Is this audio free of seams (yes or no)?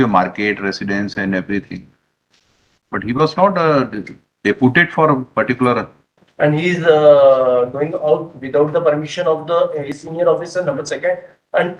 no